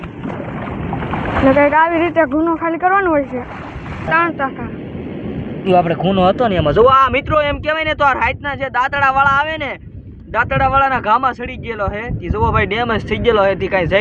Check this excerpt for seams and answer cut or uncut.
cut